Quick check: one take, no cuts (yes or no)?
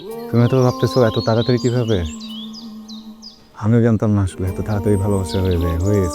yes